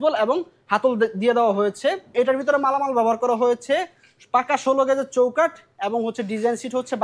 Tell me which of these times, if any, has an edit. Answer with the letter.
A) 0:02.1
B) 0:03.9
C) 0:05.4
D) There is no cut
A